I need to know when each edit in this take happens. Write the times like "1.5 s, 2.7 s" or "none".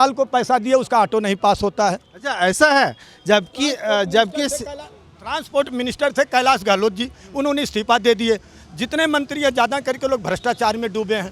none